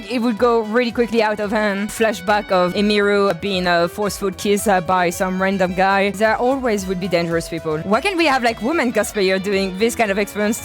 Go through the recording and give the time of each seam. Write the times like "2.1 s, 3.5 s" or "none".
1.9 s, 3.3 s, 6.1 s, 7.8 s